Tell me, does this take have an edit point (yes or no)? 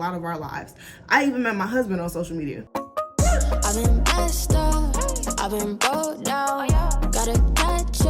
yes